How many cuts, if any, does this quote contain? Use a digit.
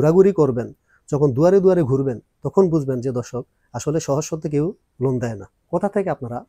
1